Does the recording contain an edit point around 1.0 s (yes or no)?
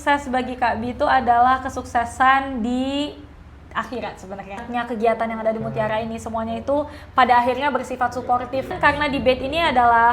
no